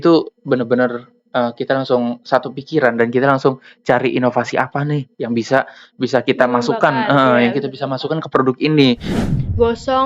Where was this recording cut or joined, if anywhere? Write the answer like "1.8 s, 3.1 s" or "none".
9.1 s